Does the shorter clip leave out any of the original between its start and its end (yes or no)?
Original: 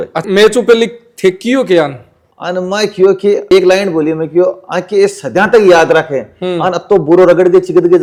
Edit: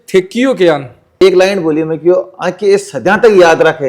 yes